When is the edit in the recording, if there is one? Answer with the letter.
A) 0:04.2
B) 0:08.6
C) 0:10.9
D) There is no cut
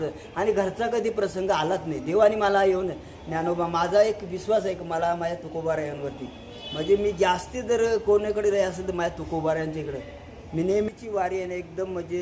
C